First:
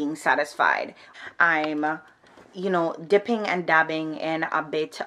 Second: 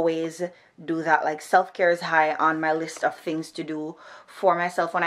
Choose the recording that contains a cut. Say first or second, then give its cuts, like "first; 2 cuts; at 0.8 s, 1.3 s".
first; 1 cut; at 1.1 s